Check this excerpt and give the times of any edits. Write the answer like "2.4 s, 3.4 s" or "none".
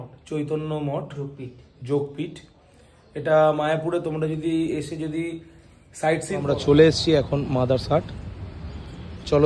6.4 s